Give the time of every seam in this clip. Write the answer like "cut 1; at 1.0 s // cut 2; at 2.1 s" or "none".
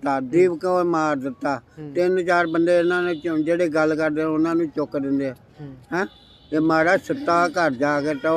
none